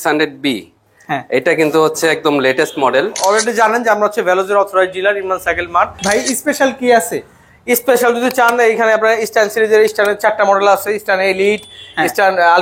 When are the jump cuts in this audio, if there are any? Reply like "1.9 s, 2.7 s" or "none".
3.1 s, 6.0 s